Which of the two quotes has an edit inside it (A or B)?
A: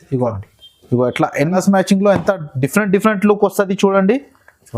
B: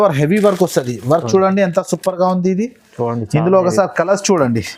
A